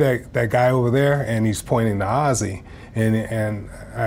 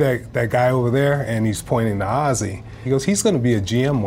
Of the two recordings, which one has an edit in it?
second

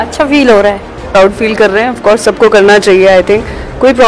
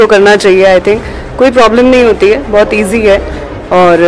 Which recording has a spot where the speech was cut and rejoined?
first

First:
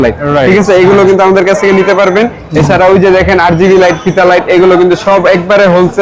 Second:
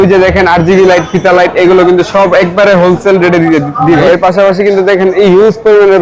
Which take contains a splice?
second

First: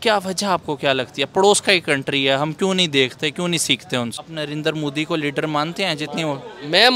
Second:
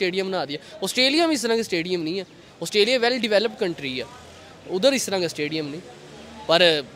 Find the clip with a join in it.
first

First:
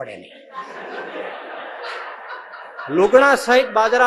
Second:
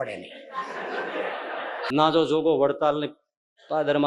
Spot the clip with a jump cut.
second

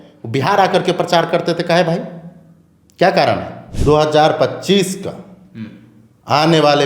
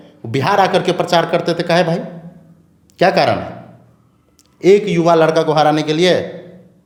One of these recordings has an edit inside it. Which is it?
first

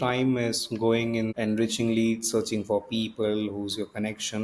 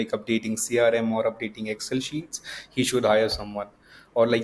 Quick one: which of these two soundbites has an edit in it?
first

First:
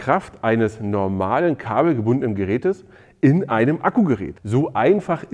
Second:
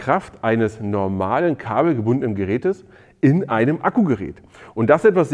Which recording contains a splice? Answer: first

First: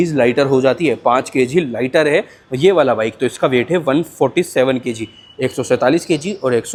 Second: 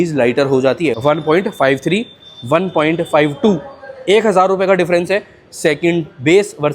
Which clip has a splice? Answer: second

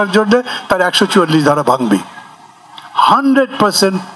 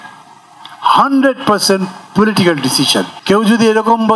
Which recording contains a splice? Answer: second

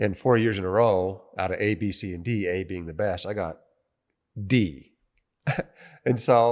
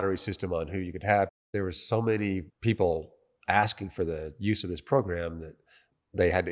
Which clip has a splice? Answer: second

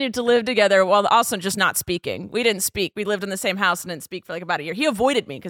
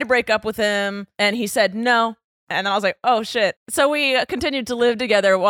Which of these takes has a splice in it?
second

